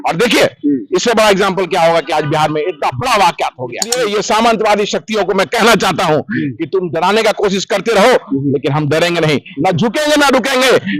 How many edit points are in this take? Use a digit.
1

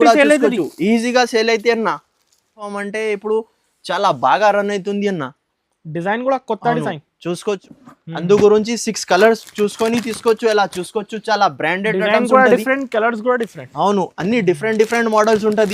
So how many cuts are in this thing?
2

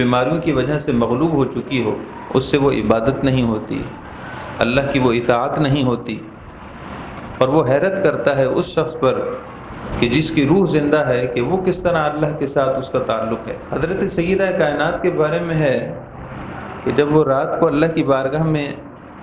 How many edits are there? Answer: 1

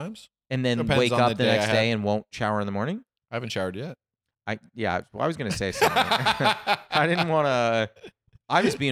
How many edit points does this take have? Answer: 0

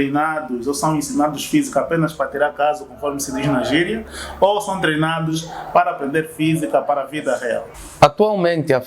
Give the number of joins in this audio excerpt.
1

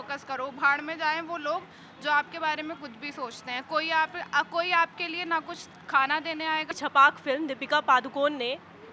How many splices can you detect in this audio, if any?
1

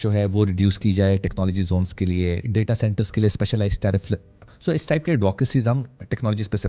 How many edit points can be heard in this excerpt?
0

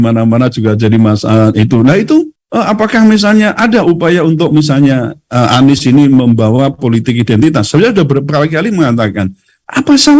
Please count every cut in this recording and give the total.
0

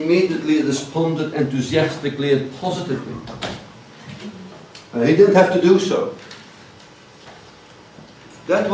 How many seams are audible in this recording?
0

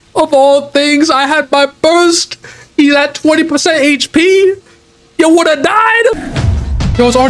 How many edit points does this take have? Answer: 0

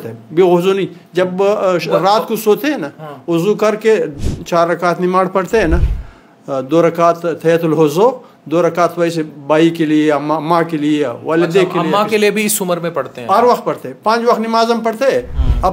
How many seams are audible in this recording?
0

